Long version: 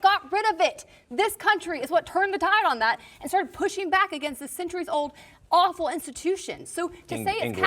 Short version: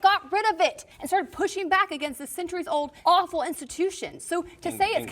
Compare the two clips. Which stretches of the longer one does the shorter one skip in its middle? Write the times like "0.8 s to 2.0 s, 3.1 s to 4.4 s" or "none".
0.9 s to 3.1 s, 5.1 s to 5.4 s